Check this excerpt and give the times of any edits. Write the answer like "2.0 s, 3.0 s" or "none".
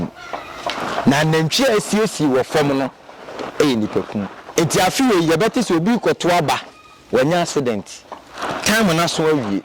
4.4 s